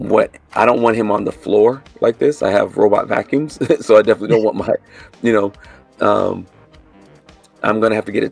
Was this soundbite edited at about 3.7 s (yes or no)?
no